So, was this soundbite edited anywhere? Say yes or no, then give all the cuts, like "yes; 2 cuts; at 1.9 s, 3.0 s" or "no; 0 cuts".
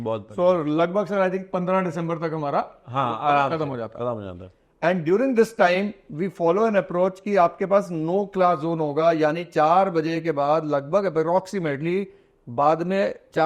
no; 0 cuts